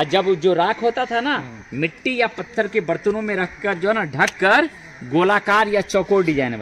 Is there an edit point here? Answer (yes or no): no